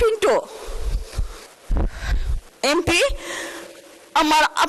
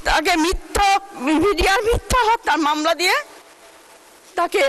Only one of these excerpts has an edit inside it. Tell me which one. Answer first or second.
first